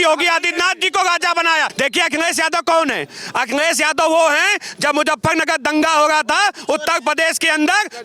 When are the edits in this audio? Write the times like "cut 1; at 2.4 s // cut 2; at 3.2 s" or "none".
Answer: cut 1; at 1.7 s